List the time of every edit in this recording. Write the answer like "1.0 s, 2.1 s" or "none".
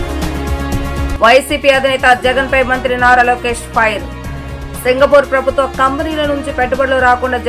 none